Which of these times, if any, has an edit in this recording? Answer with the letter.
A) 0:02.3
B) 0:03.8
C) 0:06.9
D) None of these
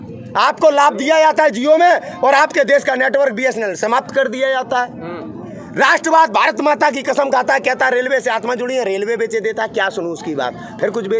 D